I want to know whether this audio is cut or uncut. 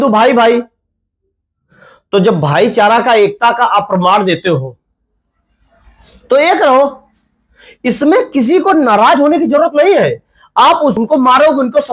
cut